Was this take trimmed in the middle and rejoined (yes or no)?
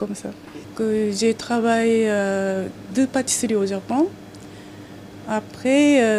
yes